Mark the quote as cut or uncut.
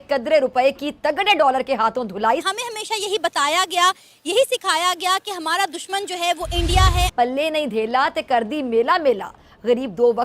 cut